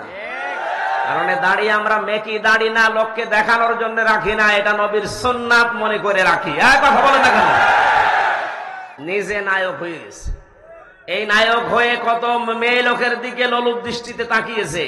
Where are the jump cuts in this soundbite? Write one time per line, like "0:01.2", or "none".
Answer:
0:08.9